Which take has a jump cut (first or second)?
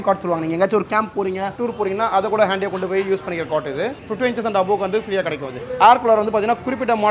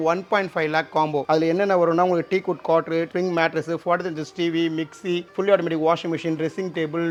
first